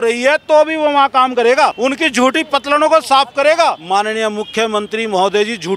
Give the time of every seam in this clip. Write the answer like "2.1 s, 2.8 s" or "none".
1.8 s, 3.8 s